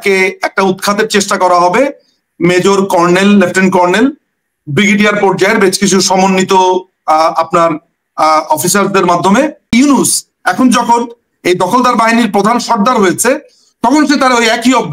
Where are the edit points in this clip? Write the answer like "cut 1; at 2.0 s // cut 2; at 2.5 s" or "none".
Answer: cut 1; at 9.7 s